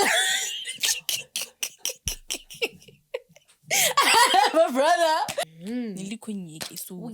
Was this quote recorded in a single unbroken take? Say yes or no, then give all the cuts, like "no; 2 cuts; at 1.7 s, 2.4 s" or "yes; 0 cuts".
no; 1 cut; at 5.4 s